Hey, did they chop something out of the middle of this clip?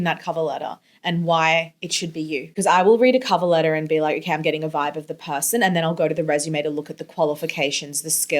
yes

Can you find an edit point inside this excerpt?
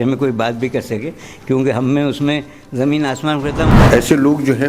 yes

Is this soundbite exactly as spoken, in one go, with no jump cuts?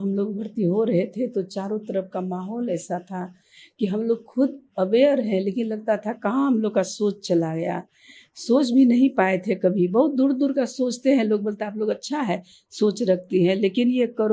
yes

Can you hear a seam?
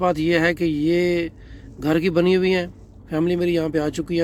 no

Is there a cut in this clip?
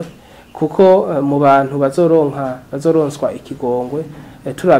no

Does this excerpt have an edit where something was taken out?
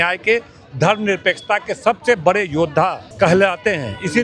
yes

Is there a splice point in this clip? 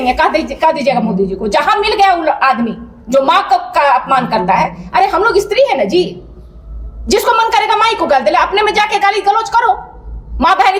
no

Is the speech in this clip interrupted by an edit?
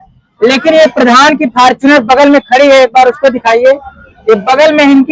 no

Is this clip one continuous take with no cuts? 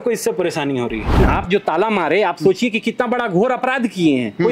no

